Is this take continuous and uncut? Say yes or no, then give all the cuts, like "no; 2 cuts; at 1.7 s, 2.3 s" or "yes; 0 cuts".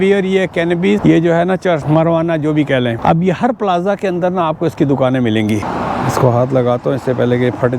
no; 4 cuts; at 1.0 s, 1.8 s, 3.0 s, 5.7 s